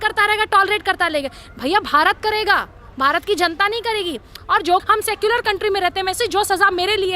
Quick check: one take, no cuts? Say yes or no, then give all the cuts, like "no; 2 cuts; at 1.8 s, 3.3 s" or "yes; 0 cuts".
no; 1 cut; at 4.8 s